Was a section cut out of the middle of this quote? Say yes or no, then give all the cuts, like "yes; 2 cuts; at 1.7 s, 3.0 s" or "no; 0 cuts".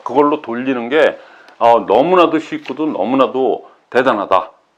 no; 0 cuts